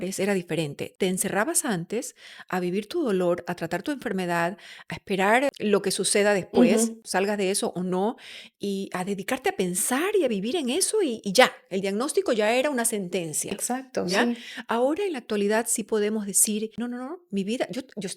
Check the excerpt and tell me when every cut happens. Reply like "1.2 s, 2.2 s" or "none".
0.9 s, 5.5 s, 7.0 s, 16.7 s